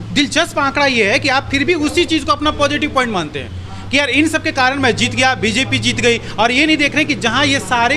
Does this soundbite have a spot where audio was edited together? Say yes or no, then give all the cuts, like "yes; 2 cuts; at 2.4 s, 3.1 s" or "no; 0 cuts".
no; 0 cuts